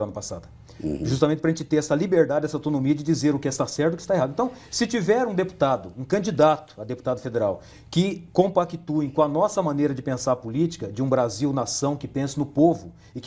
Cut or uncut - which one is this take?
uncut